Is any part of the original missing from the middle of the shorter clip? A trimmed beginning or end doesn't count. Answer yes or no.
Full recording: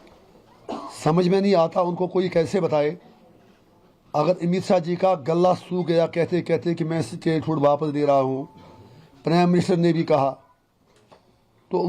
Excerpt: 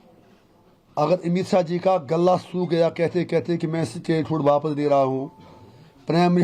no